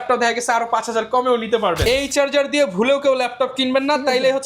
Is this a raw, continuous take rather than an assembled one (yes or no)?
no